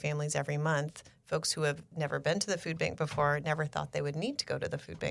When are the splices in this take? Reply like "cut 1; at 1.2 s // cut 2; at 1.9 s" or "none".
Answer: none